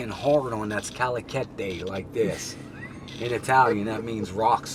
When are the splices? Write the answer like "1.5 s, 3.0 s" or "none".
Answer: none